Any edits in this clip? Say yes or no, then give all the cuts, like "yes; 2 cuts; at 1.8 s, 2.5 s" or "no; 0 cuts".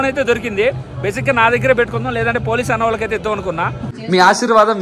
yes; 1 cut; at 3.9 s